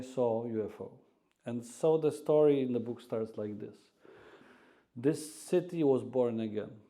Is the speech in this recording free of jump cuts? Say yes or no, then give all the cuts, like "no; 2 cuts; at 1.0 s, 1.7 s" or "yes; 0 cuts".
no; 1 cut; at 4.4 s